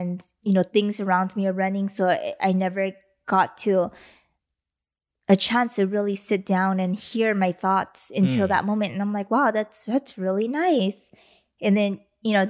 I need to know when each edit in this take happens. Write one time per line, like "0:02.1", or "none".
none